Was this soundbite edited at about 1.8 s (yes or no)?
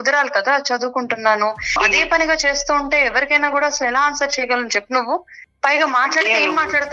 yes